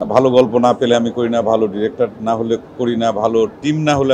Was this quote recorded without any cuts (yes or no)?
yes